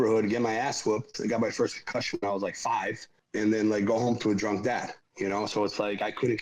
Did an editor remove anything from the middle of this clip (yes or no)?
yes